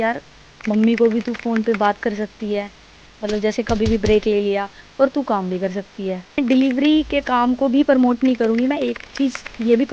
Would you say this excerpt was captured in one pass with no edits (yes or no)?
no